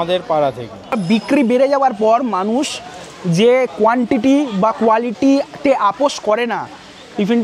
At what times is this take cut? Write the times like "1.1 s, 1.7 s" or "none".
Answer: 0.9 s